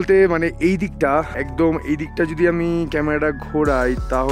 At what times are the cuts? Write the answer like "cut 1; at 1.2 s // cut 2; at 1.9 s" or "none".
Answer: cut 1; at 1.3 s